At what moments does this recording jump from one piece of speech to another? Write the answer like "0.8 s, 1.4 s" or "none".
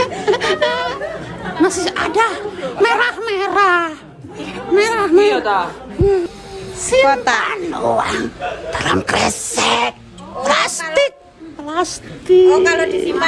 6.3 s